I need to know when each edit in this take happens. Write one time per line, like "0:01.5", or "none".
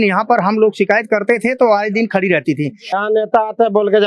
0:02.9

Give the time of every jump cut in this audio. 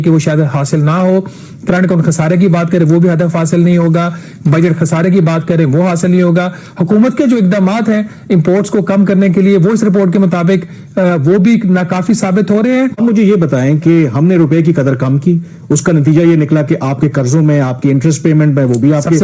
0:13.0

